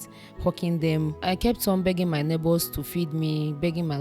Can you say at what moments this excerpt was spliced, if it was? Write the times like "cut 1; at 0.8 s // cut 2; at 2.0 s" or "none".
cut 1; at 1.2 s